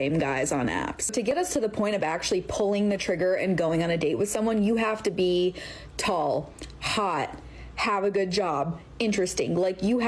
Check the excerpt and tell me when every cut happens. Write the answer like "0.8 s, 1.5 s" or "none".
1.2 s